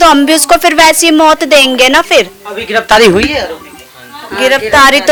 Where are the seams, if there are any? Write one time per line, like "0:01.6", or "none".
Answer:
none